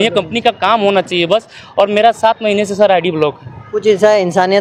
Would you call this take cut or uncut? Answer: uncut